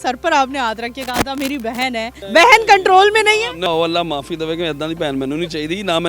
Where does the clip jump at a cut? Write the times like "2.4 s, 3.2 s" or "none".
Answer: 2.2 s, 3.7 s